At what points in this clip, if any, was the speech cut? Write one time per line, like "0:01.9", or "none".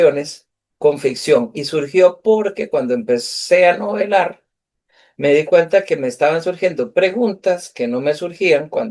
none